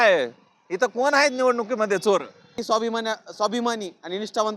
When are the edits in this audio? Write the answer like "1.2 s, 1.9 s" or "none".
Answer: 2.6 s